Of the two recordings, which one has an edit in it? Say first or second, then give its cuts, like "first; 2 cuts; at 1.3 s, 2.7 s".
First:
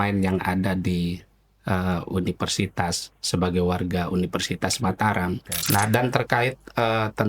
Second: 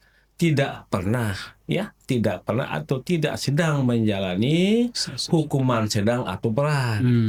first; 1 cut; at 5.5 s